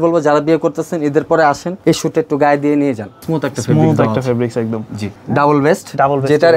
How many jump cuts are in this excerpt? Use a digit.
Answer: 3